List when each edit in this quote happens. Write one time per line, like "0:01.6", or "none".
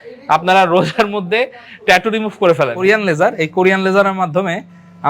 0:02.8

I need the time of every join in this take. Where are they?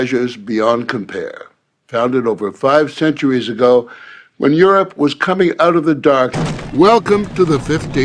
none

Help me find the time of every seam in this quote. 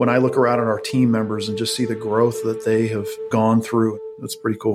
0:03.1
0:04.0

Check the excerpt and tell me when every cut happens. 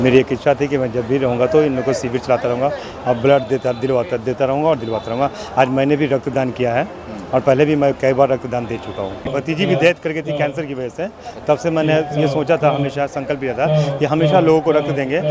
0:09.3

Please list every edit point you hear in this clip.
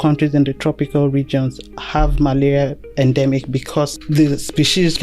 0:04.0

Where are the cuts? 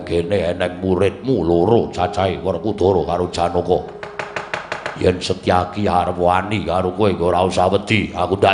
none

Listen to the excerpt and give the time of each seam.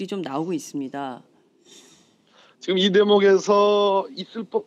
none

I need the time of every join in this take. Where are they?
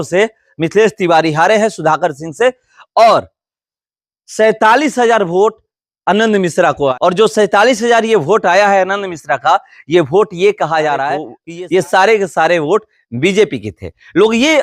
0:06.9

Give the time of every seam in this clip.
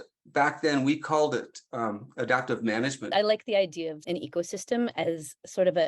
0:03.1
0:04.0

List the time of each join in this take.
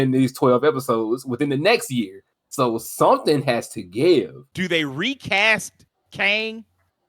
0:04.4

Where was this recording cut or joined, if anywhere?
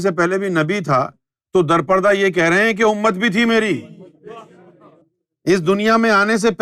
0:04.9

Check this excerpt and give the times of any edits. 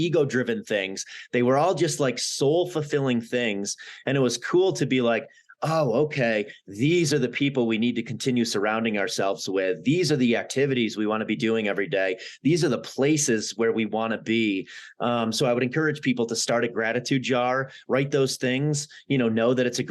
none

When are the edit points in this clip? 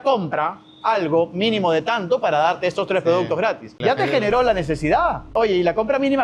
0:03.7
0:05.3

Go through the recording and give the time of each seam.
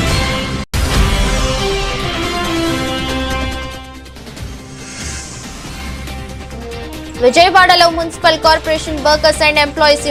none

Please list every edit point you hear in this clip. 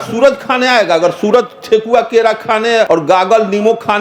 0:02.9

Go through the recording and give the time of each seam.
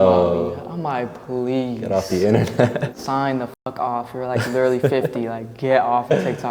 0:02.9

